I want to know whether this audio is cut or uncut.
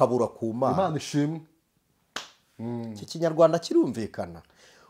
uncut